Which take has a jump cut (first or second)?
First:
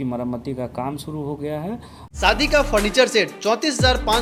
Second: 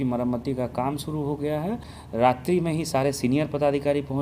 second